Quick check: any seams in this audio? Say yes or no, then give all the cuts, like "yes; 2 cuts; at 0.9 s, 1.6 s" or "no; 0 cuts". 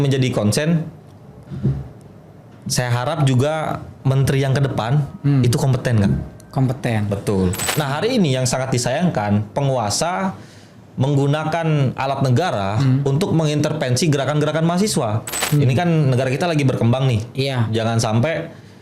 yes; 2 cuts; at 7.7 s, 15.4 s